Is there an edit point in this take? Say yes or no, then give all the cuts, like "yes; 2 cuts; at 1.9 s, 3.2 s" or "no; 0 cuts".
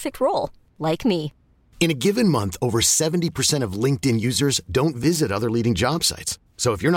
no; 0 cuts